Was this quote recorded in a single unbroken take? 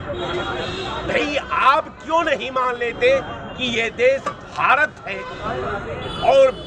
yes; 0 cuts

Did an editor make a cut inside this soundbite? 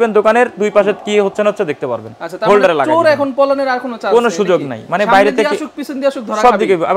no; 0 cuts

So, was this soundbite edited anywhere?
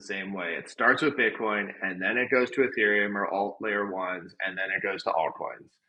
no; 0 cuts

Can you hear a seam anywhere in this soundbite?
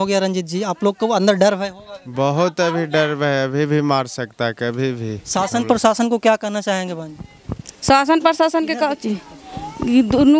yes; 1 cut; at 5.2 s

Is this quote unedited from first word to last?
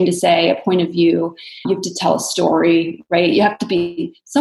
yes; 0 cuts

